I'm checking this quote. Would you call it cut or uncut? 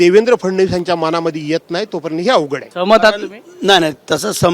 cut